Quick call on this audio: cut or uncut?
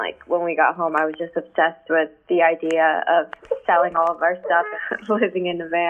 uncut